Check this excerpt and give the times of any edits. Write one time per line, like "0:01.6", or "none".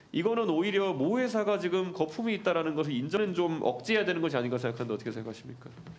0:03.2